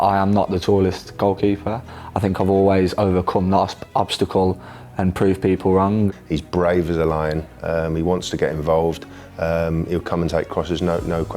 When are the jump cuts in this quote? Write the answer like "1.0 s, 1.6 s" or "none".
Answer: 1.8 s, 6.1 s